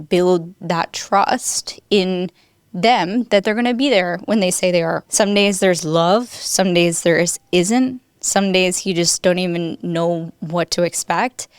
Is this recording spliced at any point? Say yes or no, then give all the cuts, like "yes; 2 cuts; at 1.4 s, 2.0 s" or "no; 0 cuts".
yes; 1 cut; at 5.0 s